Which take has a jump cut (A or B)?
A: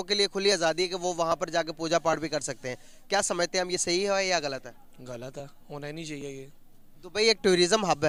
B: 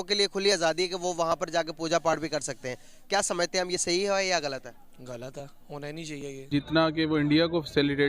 B